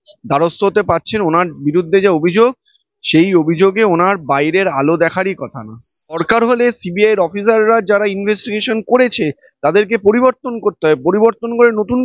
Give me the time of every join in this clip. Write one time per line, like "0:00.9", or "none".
0:06.2